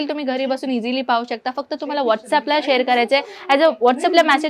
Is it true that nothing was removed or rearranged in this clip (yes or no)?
yes